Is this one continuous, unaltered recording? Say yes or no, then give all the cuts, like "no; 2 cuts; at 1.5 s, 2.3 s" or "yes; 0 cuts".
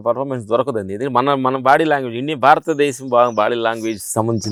yes; 0 cuts